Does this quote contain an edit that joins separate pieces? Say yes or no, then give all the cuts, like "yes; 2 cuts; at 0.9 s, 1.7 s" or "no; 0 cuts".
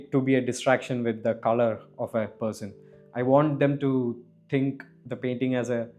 no; 0 cuts